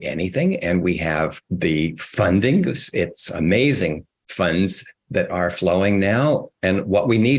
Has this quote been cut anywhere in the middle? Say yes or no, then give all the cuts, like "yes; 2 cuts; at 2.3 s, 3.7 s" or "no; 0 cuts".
yes; 2 cuts; at 1.4 s, 6.5 s